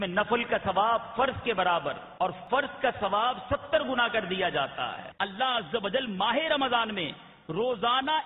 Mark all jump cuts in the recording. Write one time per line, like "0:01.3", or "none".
0:02.4
0:05.0